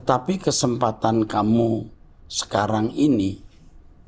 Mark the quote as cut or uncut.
uncut